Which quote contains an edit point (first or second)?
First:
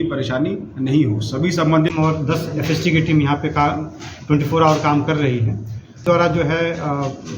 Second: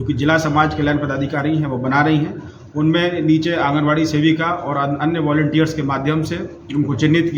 first